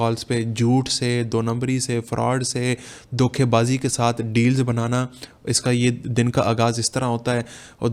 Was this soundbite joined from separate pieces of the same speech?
no; 0 cuts

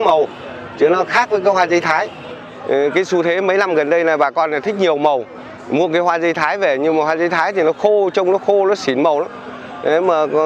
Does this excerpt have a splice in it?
no; 0 cuts

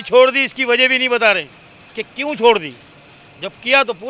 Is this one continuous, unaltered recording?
yes; 0 cuts

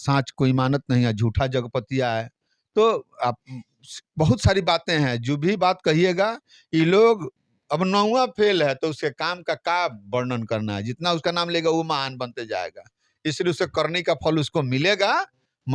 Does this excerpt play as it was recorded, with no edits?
yes; 0 cuts

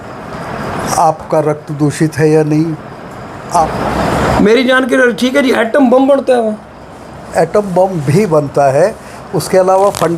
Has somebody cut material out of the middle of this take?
yes; 1 cut; at 3.6 s

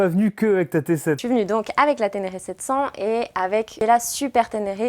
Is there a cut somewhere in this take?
yes; 2 cuts; at 1.2 s, 3.7 s

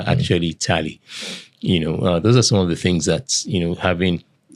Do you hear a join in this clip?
no; 0 cuts

